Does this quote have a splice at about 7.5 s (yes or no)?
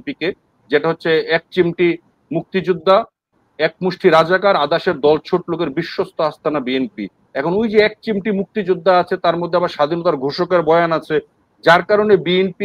no